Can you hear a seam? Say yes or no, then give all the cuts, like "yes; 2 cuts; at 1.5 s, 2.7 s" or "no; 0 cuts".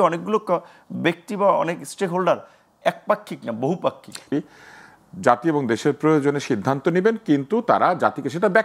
yes; 1 cut; at 4.3 s